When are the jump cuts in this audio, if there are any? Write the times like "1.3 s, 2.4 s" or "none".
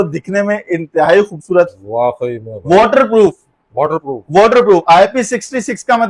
none